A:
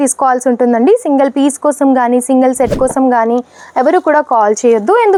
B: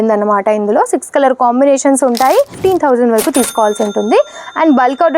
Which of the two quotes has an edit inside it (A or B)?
B